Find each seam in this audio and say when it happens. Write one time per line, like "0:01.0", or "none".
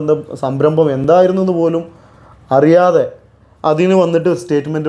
none